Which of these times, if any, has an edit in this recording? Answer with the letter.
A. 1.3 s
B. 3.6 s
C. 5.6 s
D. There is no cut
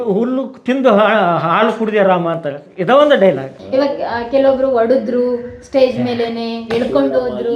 B